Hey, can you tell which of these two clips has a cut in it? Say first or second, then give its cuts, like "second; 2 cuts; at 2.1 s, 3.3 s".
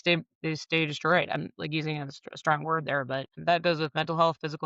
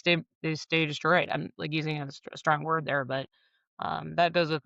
first; 1 cut; at 3.3 s